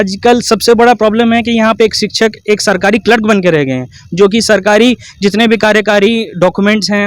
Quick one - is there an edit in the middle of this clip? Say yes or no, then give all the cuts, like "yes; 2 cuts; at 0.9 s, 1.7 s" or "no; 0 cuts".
no; 0 cuts